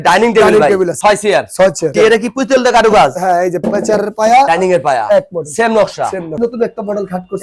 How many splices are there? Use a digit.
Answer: 2